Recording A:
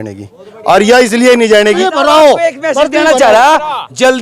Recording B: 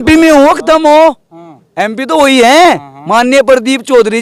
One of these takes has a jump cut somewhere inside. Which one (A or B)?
A